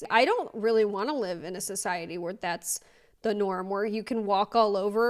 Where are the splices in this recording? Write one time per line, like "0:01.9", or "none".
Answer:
none